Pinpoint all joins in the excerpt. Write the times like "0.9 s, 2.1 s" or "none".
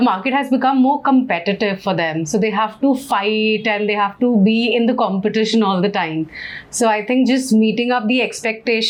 none